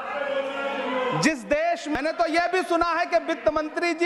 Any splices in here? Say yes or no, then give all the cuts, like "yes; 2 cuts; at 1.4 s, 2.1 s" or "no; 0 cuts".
yes; 1 cut; at 1.9 s